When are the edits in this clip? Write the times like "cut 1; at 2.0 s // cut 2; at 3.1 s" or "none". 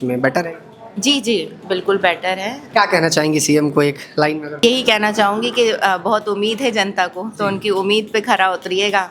cut 1; at 2.6 s // cut 2; at 4.6 s